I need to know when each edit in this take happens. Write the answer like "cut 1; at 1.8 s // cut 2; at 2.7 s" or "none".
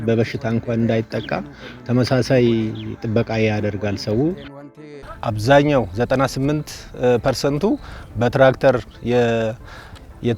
cut 1; at 4.9 s